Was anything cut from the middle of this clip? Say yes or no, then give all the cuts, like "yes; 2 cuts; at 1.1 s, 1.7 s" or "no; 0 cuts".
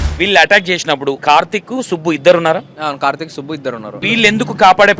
yes; 2 cuts; at 1.2 s, 4.0 s